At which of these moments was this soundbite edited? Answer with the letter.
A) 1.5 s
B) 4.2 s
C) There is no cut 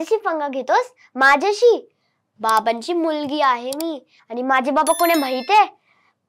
C